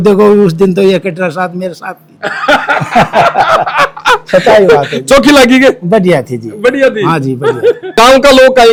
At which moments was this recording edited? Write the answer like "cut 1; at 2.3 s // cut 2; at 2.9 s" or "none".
none